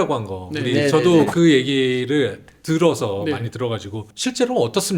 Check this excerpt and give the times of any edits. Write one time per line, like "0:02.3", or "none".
none